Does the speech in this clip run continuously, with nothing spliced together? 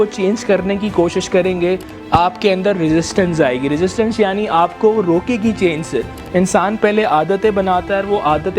no; 1 cut; at 6.2 s

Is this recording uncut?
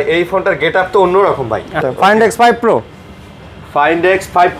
no; 1 cut; at 1.8 s

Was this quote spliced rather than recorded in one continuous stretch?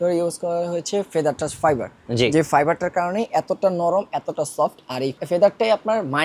yes; 1 cut; at 5.2 s

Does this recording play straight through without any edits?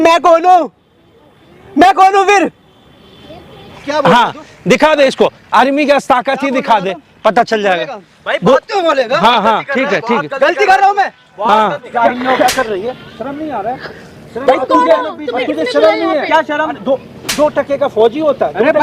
no; 2 cuts; at 3.7 s, 11.9 s

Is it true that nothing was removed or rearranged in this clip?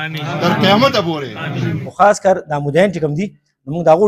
no; 1 cut; at 1.8 s

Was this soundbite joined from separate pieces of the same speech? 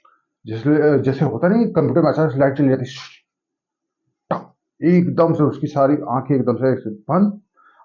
no; 0 cuts

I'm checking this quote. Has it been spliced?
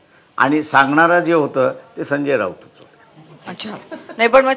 no; 0 cuts

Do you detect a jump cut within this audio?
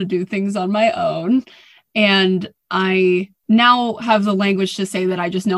yes; 1 cut; at 3.3 s

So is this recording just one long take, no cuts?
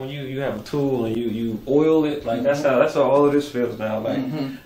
yes; 0 cuts

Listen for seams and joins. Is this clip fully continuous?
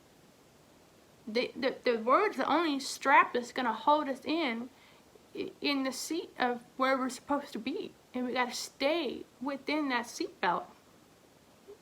no; 2 cuts; at 8.0 s, 9.3 s

